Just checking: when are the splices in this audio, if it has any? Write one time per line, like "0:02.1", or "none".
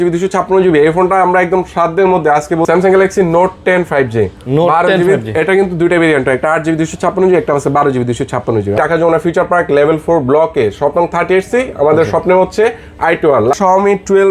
0:02.6
0:08.8
0:13.6